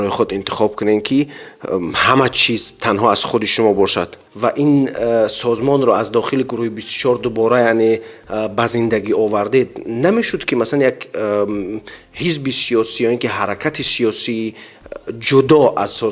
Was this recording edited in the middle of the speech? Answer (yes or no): yes